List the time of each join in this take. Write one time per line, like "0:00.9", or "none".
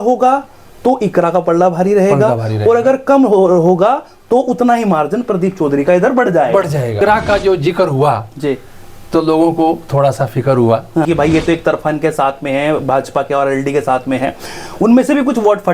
0:06.9
0:11.1

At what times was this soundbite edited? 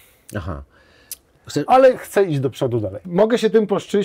0:03.0

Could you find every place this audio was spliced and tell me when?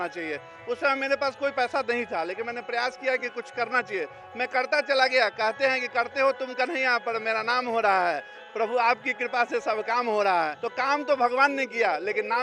none

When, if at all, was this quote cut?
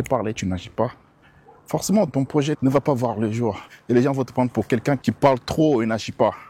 0:02.1
0:05.0

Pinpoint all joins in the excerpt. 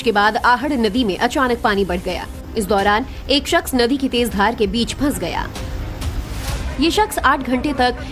0:04.3

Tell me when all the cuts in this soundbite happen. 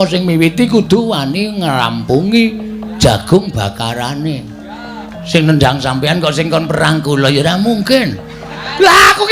0:05.1

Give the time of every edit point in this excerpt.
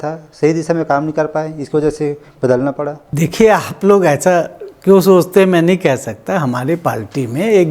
0:03.0

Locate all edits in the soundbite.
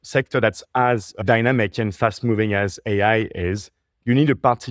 0:01.2

